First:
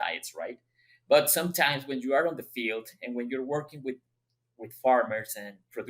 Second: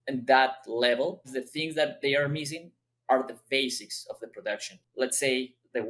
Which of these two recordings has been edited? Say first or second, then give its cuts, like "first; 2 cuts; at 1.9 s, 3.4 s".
second; 2 cuts; at 1.4 s, 4.8 s